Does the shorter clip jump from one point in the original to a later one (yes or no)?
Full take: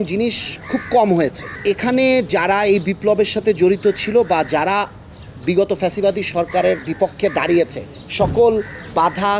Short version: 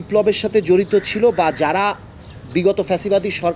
no